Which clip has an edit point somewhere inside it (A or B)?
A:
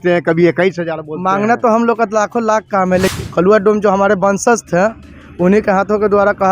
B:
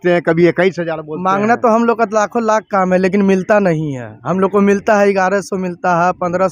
A